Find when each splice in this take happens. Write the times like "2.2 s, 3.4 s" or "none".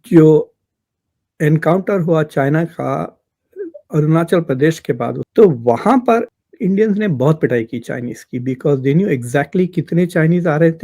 5.2 s, 6.3 s